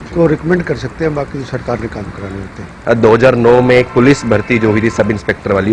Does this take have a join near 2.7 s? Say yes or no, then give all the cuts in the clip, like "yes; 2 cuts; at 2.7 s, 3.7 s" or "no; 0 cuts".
yes; 1 cut; at 2.7 s